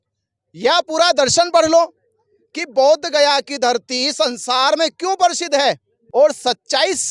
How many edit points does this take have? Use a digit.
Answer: 1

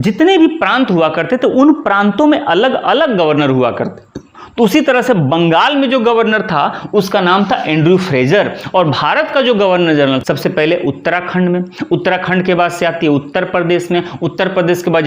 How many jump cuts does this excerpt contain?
1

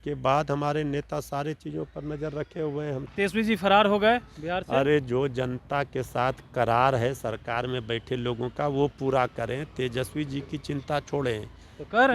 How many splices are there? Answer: 1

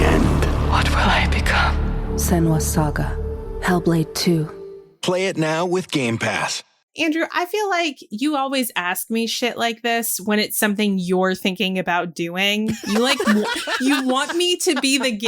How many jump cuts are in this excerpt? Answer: 1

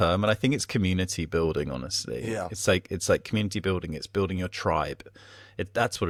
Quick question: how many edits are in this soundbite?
0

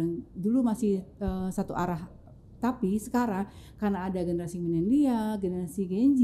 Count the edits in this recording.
0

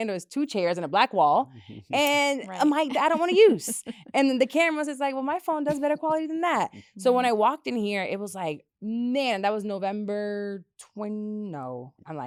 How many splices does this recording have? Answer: 0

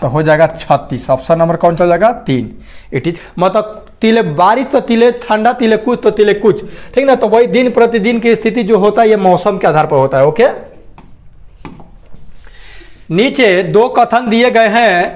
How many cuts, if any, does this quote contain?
1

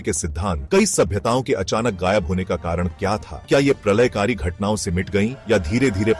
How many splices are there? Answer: 0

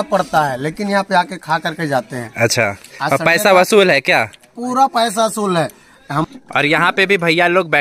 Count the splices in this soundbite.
1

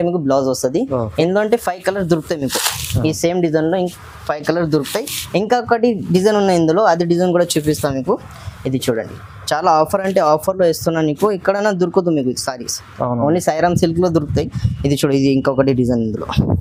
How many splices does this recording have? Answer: 0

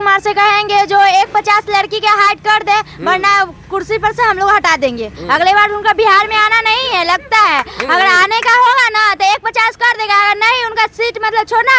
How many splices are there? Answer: 0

